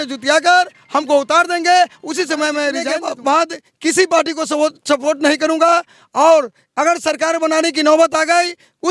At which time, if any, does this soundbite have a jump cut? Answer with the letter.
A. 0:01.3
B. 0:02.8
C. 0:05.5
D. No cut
B